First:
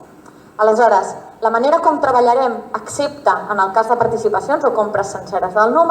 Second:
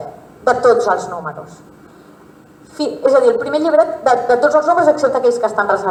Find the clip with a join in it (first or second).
first